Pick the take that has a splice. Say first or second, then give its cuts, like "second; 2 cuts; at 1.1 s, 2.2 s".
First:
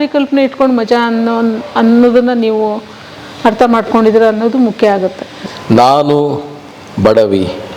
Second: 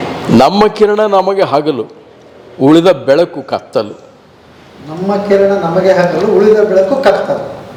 first; 1 cut; at 5.3 s